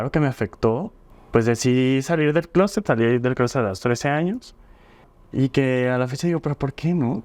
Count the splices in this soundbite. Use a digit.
2